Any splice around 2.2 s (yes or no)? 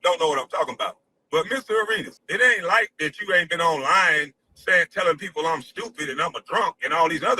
yes